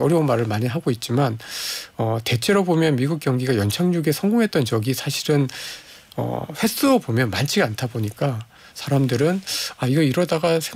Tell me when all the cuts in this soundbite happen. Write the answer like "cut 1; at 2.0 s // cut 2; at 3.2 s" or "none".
none